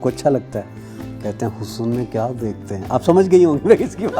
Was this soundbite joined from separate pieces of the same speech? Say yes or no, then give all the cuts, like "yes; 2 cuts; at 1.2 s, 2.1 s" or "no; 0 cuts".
no; 0 cuts